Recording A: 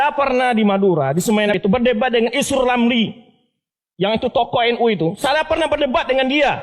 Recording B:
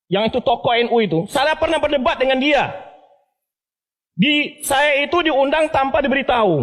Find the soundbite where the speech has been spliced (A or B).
A